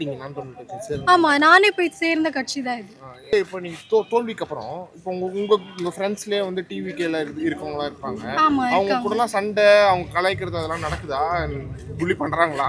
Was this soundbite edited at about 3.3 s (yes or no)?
yes